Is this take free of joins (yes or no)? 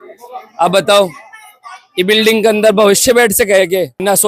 yes